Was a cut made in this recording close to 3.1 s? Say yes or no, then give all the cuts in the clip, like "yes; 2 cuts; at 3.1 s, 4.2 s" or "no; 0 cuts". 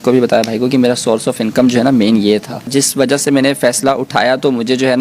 yes; 1 cut; at 3.1 s